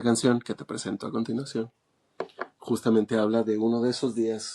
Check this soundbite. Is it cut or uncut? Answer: uncut